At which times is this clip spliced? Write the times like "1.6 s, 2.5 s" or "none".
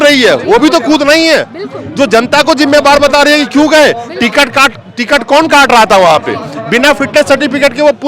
none